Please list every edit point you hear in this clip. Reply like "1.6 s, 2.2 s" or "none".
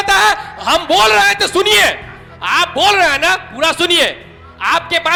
none